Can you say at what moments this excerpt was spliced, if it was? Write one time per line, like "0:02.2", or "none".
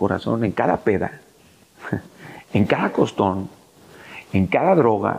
none